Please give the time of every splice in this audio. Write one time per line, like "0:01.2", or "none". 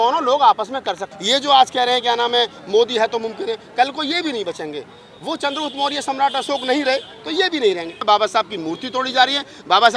0:01.1
0:08.0